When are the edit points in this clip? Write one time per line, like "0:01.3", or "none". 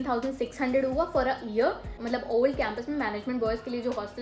0:01.9